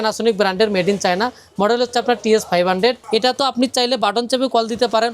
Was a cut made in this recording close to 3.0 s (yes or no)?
yes